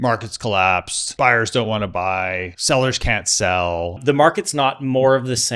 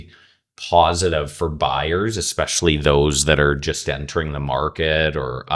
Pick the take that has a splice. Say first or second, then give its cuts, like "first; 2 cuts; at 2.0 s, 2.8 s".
first; 3 cuts; at 1.0 s, 2.5 s, 4.0 s